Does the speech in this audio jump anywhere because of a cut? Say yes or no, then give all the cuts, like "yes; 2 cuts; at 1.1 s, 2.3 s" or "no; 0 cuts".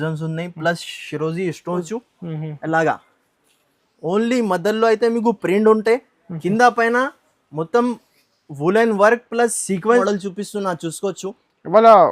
yes; 2 cuts; at 1.8 s, 10.0 s